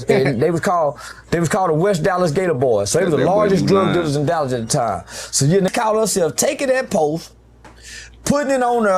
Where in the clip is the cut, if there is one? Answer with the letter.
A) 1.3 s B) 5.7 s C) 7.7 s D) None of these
B